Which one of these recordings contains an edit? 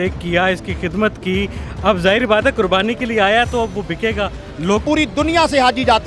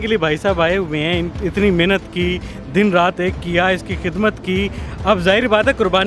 first; 1 cut; at 4.8 s

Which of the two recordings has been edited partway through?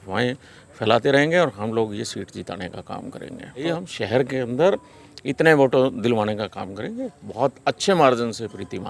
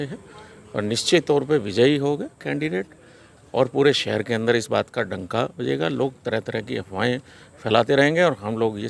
first; 1 cut; at 3.7 s

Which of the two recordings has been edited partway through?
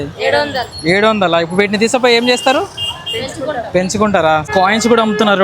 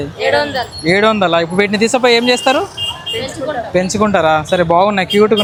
first; 1 cut; at 4.4 s

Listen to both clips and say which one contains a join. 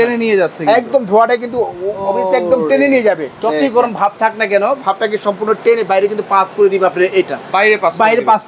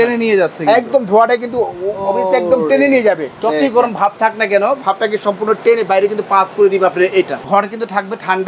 second; 1 cut; at 7.4 s

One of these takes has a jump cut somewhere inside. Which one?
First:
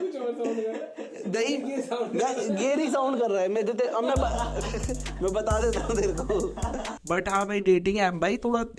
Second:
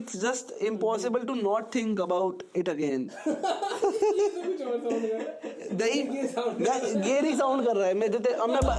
first; 1 cut; at 6.9 s

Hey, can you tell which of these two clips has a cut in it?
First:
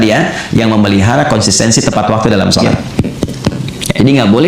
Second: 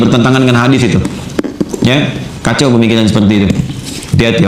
first; 1 cut; at 3.1 s

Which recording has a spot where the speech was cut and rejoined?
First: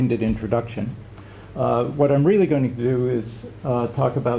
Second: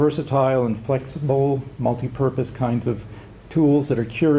second; 1 cut; at 2.5 s

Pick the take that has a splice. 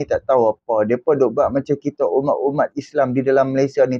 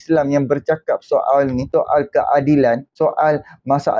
second; 2 cuts; at 1.6 s, 2.9 s

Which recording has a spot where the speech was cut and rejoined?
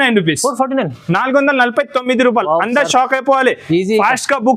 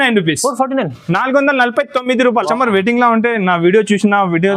second; 1 cut; at 2.5 s

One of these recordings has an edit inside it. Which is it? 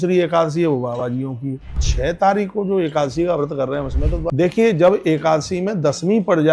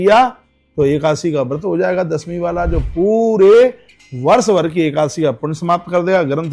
first; 2 cuts; at 1.8 s, 4.2 s

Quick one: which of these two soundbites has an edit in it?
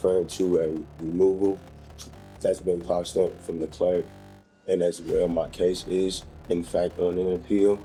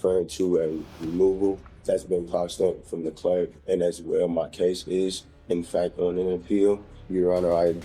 second; 3 cuts; at 1.7 s, 3.6 s, 6.9 s

